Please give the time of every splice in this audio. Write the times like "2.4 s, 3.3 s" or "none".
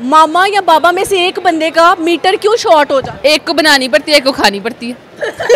3.1 s